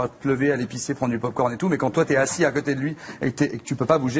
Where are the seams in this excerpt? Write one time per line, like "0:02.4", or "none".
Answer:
none